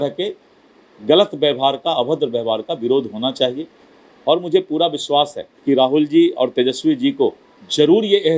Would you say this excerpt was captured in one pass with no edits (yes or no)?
no